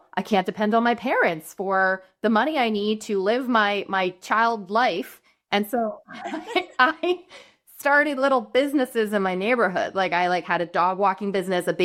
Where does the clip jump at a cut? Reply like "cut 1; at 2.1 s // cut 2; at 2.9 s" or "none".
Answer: none